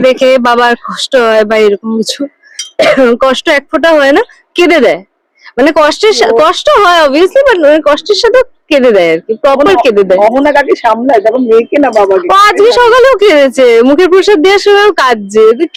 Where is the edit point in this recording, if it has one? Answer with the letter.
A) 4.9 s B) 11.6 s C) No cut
C